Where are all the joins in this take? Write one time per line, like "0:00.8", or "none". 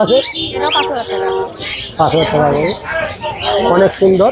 none

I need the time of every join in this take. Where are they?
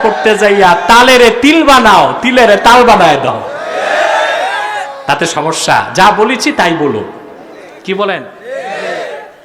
none

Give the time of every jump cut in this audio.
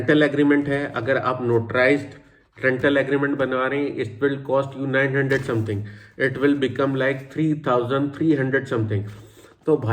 none

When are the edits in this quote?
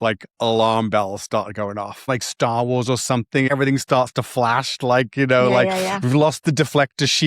0:02.1
0:03.5

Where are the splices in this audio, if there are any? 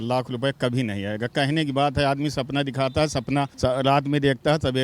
0:03.5

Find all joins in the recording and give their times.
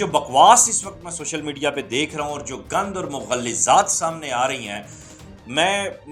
none

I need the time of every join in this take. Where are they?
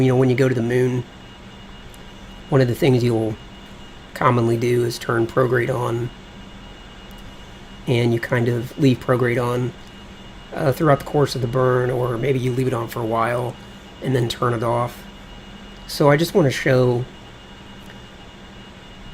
none

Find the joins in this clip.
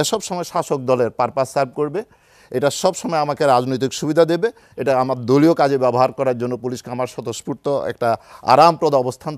none

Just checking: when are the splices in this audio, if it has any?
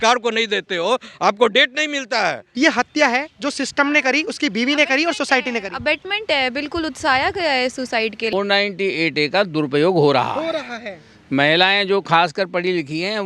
0:02.4
0:08.3

